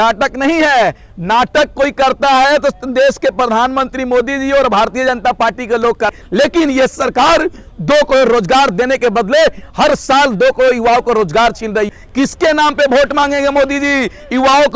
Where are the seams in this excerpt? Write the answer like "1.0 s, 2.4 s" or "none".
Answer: 6.2 s, 11.9 s

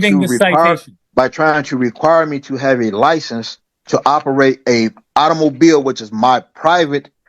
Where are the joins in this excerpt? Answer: 0.9 s

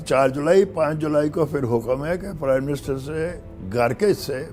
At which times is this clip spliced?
none

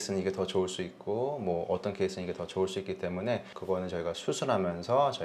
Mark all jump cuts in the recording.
3.5 s

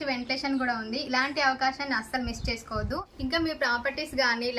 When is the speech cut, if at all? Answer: 3.1 s

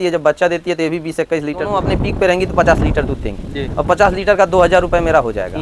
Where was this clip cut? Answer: 1.8 s

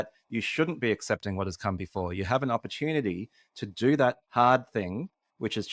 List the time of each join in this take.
none

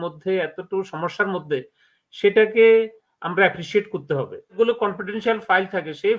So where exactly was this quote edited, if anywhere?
4.5 s

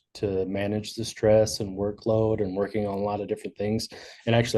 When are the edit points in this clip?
none

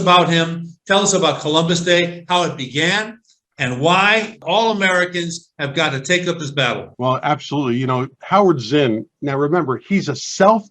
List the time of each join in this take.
4.3 s, 6.9 s

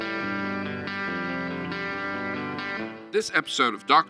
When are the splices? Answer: 3.0 s

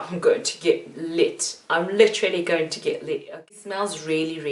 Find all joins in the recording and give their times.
3.5 s

